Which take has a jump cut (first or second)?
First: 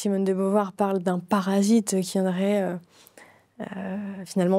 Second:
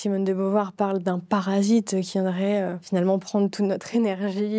second